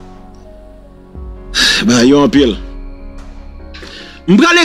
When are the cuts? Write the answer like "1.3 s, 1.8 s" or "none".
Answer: none